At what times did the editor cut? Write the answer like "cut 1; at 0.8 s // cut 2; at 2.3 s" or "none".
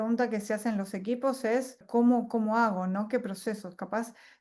cut 1; at 1.8 s